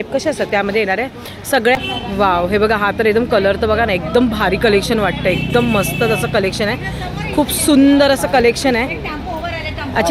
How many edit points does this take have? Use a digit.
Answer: 1